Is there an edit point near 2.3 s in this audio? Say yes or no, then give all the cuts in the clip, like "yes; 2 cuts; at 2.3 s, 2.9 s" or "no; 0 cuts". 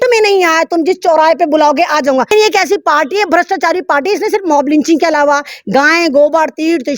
yes; 1 cut; at 2.3 s